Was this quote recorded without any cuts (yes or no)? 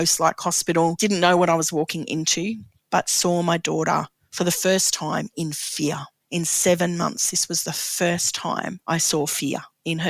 no